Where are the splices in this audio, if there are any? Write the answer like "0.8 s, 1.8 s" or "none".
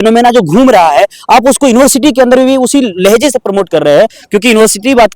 4.2 s